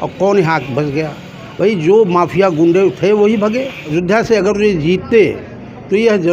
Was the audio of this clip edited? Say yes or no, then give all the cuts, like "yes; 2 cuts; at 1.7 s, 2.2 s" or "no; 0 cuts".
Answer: yes; 1 cut; at 3.8 s